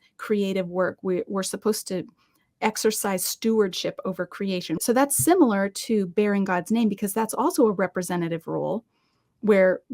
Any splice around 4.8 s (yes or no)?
yes